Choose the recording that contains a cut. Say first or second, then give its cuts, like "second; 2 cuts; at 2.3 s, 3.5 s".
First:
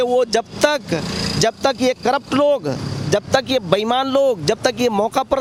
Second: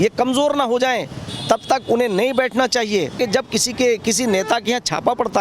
second; 1 cut; at 3.1 s